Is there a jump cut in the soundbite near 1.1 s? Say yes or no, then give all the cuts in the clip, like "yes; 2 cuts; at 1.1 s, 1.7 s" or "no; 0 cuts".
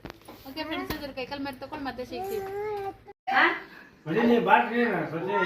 no; 1 cut; at 3.1 s